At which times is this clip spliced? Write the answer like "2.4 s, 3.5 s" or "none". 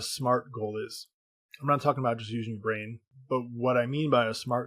3.1 s